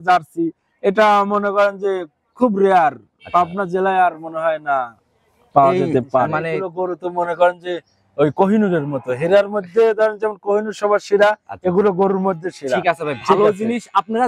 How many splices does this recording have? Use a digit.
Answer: 1